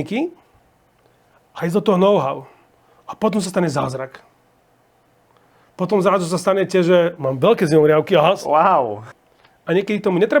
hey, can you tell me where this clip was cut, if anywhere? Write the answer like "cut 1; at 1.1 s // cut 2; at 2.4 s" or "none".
cut 1; at 9.2 s